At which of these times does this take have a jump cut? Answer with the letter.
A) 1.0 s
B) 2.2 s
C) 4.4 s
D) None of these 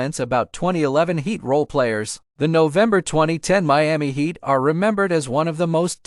D